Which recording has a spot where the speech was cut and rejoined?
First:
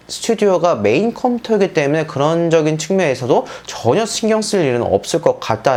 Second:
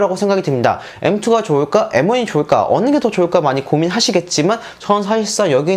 second; 1 cut; at 4.7 s

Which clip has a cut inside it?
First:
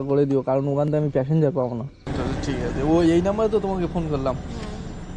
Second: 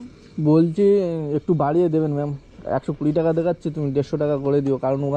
first; 1 cut; at 2.1 s

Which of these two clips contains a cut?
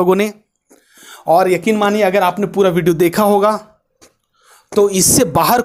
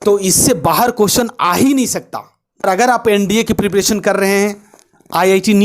second; 1 cut; at 2.6 s

